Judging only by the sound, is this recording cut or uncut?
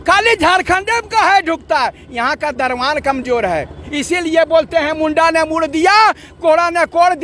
cut